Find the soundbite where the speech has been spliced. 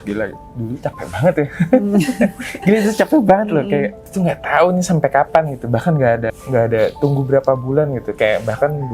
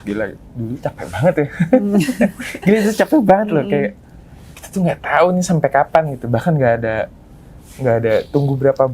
first; 2 cuts; at 4.0 s, 6.3 s

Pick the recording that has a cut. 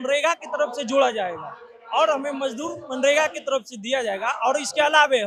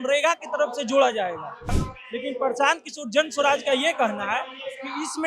second; 1 cut; at 1.8 s

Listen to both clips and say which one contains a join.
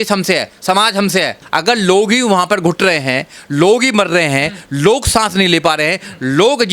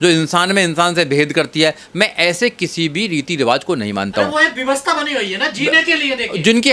first; 1 cut; at 1.4 s

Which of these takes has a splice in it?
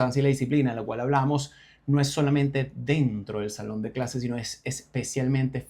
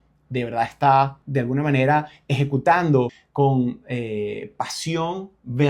second; 2 cuts; at 1.2 s, 3.2 s

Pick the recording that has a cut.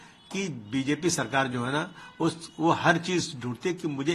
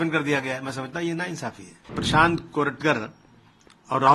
second; 1 cut; at 2.0 s

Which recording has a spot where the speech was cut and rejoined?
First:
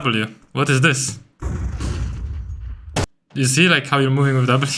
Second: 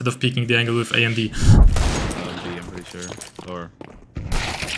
second; 1 cut; at 1.4 s

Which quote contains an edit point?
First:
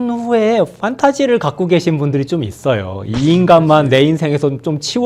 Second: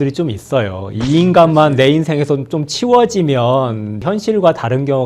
second; 1 cut; at 4.0 s

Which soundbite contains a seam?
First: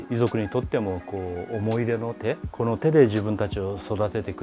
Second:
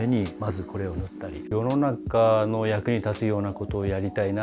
second; 1 cut; at 1.4 s

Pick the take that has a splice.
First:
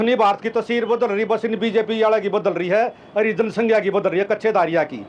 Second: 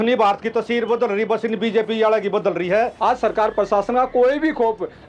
second; 1 cut; at 2.9 s

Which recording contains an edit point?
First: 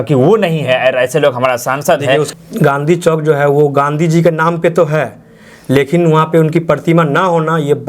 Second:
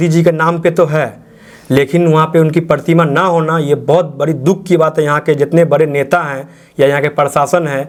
first; 1 cut; at 2.3 s

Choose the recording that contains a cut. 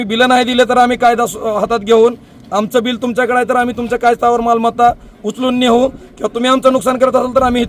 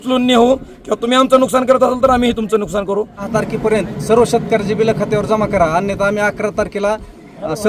second; 1 cut; at 3.3 s

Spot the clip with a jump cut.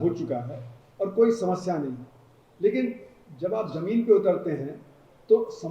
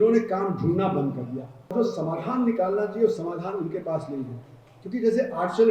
second; 1 cut; at 1.7 s

